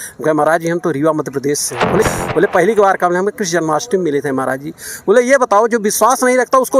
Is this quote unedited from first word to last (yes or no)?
no